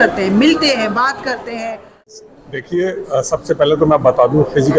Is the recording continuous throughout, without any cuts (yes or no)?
no